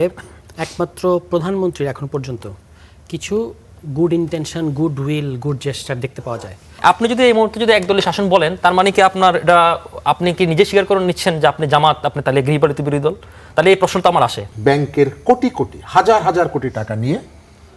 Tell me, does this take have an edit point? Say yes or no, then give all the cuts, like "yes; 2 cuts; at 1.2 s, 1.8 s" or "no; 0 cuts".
yes; 2 cuts; at 6.8 s, 14.4 s